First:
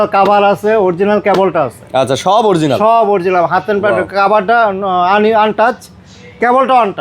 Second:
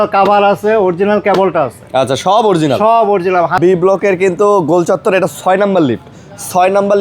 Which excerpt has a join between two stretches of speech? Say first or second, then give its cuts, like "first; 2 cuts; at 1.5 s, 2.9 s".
second; 1 cut; at 3.6 s